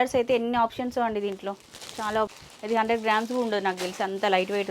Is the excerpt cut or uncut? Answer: cut